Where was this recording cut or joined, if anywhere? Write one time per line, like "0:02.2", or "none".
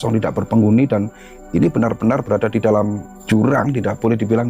0:03.1